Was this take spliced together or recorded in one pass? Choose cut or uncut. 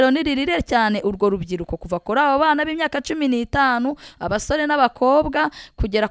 uncut